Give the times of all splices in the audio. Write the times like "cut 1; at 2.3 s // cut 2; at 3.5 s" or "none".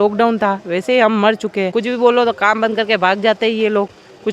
cut 1; at 1.7 s